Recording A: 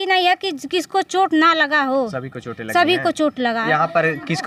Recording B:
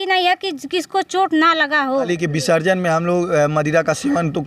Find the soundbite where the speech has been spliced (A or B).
B